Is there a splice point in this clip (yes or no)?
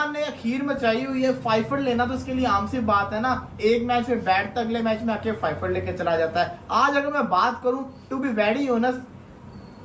no